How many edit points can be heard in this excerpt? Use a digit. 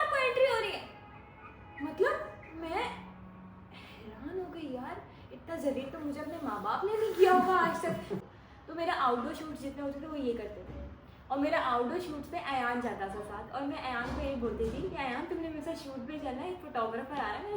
1